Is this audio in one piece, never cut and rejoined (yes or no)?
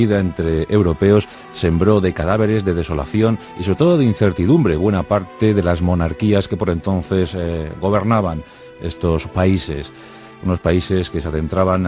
yes